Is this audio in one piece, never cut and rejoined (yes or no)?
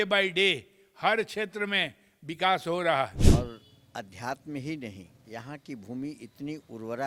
no